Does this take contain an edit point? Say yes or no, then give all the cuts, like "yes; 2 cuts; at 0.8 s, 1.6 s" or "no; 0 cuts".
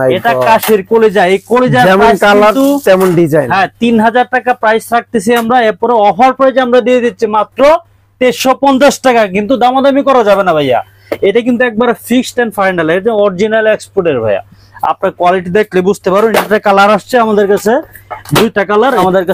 no; 0 cuts